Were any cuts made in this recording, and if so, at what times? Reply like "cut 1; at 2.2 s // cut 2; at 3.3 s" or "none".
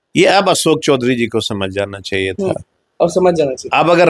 cut 1; at 2.8 s